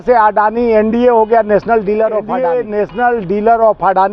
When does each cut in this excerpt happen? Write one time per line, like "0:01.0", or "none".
0:02.4